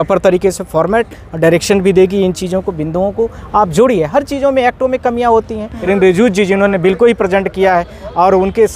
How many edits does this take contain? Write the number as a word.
one